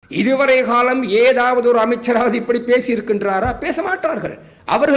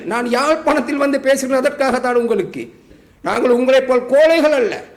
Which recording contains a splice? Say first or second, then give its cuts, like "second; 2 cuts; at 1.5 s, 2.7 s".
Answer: second; 1 cut; at 2.8 s